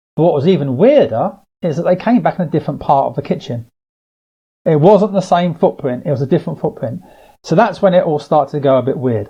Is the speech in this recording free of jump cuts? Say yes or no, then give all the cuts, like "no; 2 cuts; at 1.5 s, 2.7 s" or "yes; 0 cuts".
yes; 0 cuts